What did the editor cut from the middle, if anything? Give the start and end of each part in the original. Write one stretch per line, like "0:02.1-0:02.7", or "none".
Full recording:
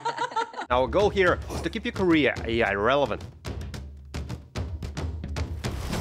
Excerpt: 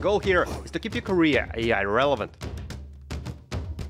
0:03.2-0:03.4